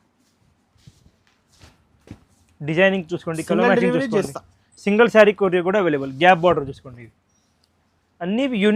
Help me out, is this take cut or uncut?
uncut